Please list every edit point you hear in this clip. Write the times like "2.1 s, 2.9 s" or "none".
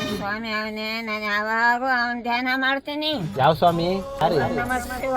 4.2 s